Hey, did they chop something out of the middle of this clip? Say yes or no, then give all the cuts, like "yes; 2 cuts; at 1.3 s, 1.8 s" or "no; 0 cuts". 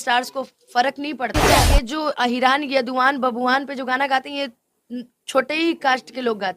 yes; 1 cut; at 1.7 s